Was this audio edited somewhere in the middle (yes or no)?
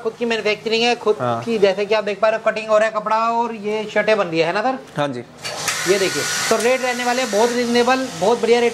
no